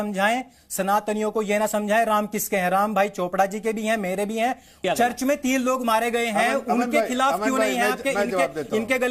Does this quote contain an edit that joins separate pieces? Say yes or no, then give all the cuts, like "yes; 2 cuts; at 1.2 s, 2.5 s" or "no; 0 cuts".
yes; 1 cut; at 4.8 s